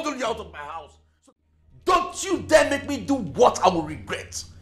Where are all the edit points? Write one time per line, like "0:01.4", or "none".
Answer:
0:01.2